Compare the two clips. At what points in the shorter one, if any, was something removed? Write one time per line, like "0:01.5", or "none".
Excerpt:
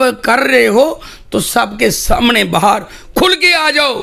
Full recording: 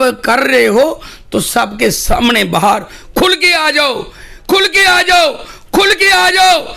none